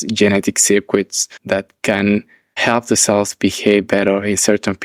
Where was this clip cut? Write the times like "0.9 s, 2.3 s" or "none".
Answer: none